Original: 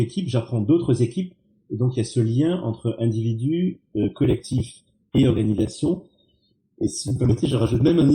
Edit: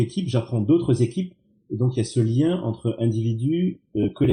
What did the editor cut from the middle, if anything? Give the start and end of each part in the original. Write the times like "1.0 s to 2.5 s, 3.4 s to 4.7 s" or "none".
none